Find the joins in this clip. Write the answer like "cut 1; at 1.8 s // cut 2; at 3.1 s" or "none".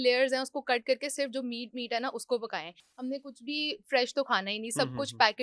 cut 1; at 2.9 s